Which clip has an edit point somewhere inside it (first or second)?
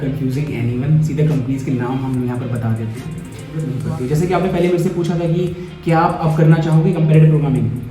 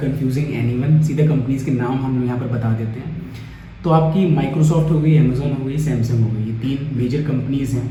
first